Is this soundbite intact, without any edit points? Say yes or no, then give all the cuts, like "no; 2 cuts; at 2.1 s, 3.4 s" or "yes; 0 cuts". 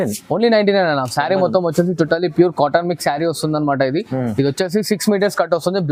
yes; 0 cuts